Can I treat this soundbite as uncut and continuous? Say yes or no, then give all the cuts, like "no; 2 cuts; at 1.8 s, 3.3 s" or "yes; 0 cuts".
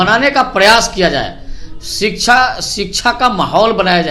yes; 0 cuts